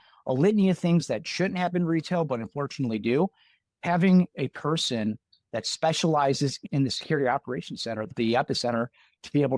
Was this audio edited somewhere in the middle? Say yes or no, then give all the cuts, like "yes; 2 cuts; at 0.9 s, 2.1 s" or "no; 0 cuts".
yes; 2 cuts; at 6.6 s, 8.1 s